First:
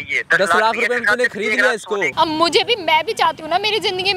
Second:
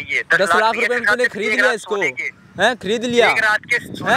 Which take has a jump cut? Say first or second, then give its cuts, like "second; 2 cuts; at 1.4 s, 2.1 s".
first; 1 cut; at 2.1 s